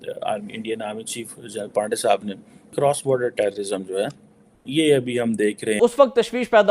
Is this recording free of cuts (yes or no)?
no